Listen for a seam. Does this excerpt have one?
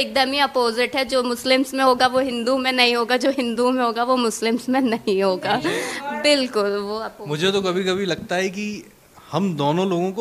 no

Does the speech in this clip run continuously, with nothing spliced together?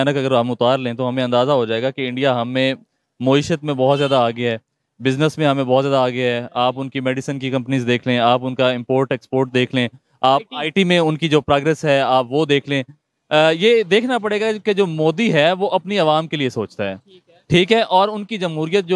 yes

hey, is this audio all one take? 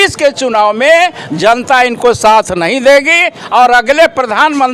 yes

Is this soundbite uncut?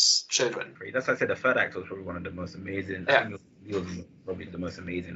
yes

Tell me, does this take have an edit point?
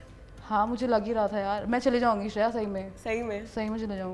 no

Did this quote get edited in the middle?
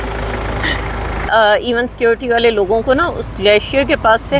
yes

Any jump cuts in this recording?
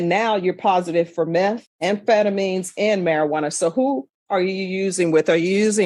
no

